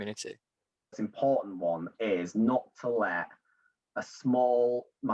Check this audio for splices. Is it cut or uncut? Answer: cut